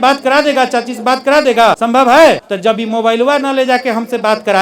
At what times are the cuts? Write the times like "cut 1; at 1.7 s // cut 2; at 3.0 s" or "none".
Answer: cut 1; at 1.8 s // cut 2; at 2.5 s